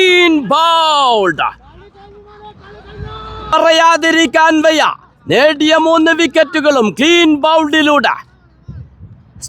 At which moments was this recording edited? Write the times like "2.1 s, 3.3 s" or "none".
3.5 s